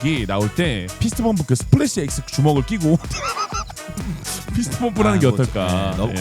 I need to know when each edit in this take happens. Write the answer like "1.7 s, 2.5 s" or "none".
none